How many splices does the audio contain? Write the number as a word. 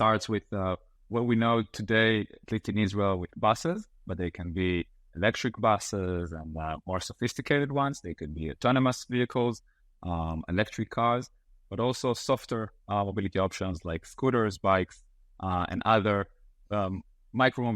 one